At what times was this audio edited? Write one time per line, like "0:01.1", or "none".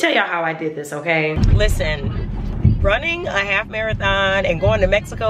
0:01.4